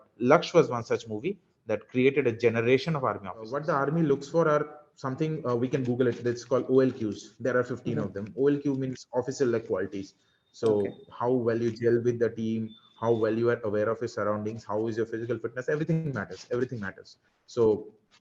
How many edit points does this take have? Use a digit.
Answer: 1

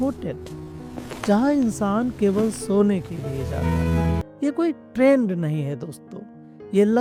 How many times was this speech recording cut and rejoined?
1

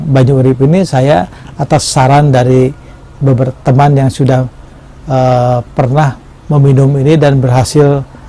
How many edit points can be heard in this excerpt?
0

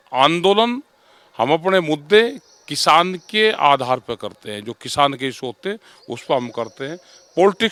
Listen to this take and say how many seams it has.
0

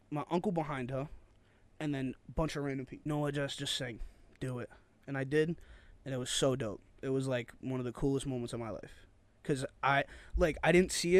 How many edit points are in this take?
1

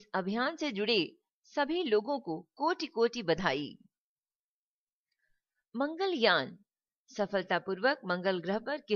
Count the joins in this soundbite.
1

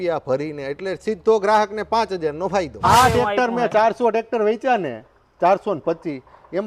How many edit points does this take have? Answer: 1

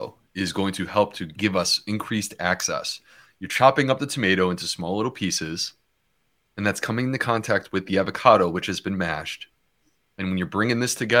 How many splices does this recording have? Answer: 1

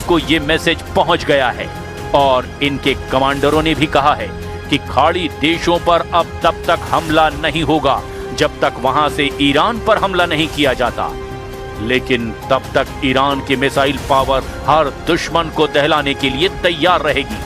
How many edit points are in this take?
0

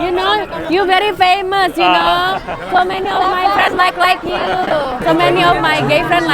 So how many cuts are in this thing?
1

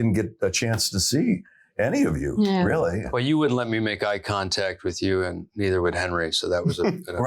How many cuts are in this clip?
1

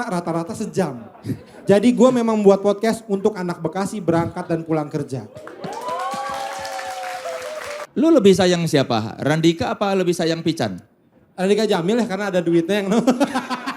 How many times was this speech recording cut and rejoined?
1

